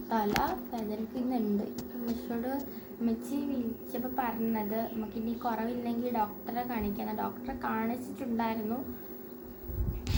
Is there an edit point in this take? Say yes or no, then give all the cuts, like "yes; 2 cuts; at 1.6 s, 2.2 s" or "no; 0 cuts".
no; 0 cuts